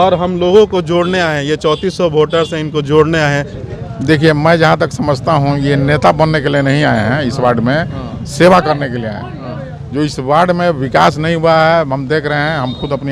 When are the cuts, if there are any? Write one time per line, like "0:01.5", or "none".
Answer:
0:03.6